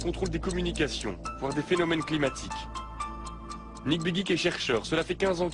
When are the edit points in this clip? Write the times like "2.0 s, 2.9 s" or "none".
4.3 s

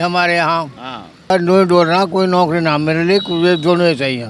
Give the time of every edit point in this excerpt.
1.3 s

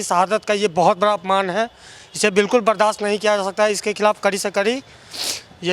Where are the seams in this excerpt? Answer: none

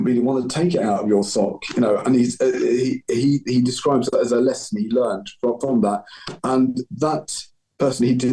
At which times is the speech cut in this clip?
none

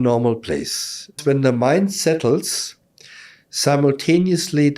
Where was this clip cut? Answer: 1.2 s

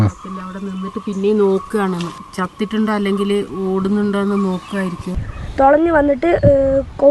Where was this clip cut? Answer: 2.2 s, 5.2 s

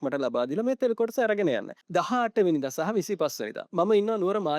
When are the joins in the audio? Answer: 1.8 s

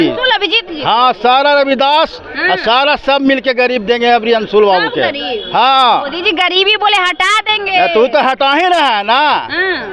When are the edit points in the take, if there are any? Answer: none

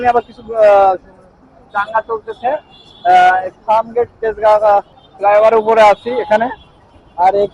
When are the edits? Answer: 5.0 s

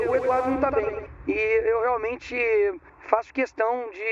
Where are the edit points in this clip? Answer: none

